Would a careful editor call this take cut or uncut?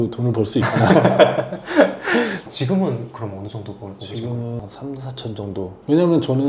cut